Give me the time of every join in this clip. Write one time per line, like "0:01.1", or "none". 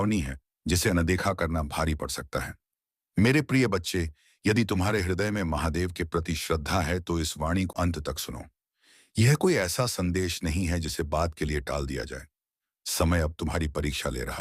0:07.7